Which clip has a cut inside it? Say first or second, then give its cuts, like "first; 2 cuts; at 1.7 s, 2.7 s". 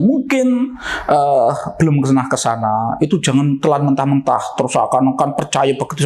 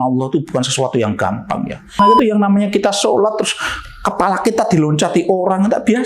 second; 1 cut; at 2.0 s